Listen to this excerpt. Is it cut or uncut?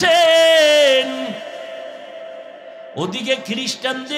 uncut